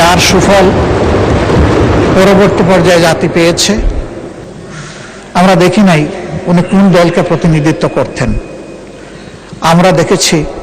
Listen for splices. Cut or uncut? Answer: cut